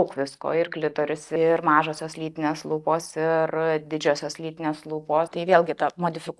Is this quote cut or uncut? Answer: cut